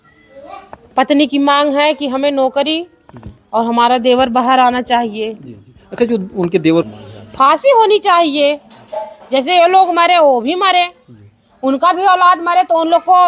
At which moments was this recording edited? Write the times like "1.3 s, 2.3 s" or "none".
6.9 s